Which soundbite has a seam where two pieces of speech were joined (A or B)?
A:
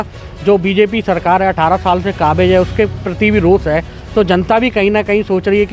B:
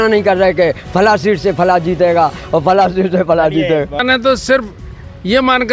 B